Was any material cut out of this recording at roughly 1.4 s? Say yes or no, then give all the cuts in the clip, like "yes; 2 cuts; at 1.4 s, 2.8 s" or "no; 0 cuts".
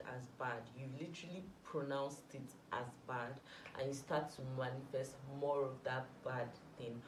no; 0 cuts